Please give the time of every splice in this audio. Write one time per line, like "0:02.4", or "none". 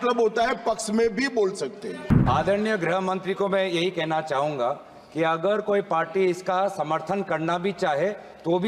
0:02.1

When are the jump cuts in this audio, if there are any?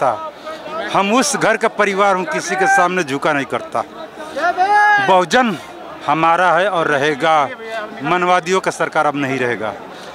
none

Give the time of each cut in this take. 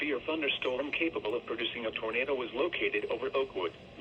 none

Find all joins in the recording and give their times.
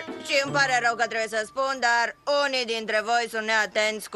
0:01.7

